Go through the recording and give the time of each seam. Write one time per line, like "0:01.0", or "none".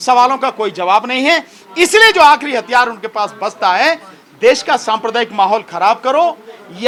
none

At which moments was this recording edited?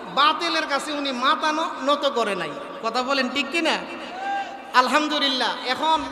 none

